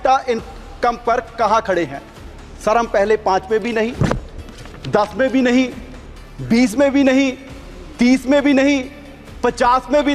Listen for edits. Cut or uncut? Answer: uncut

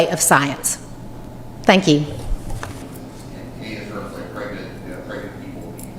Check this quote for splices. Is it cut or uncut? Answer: cut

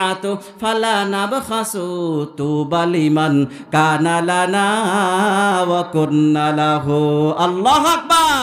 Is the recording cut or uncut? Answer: uncut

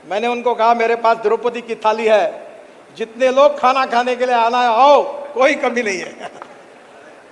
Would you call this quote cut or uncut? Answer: uncut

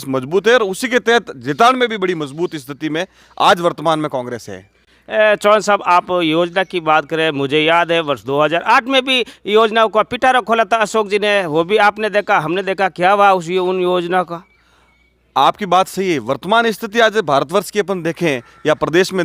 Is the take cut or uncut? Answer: uncut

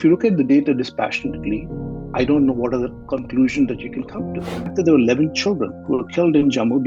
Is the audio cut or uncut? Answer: cut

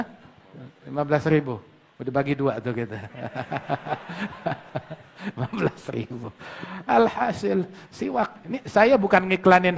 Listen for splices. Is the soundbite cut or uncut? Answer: uncut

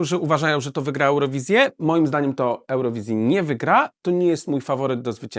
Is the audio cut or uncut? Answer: uncut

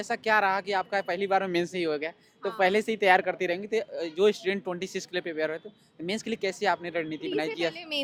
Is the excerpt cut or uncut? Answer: uncut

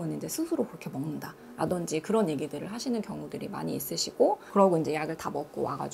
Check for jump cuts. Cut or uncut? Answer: uncut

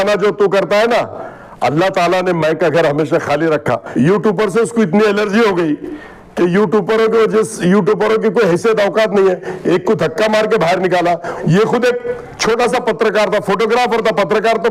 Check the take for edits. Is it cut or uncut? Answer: cut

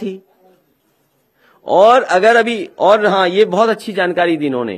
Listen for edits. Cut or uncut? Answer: uncut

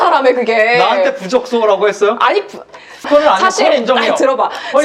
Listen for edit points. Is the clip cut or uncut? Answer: cut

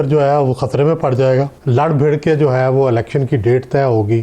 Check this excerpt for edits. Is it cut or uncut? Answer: cut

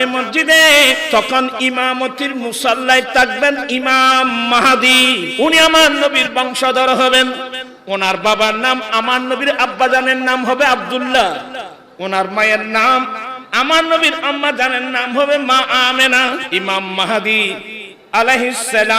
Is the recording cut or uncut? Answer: cut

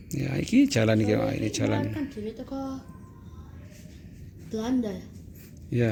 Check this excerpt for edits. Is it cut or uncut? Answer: uncut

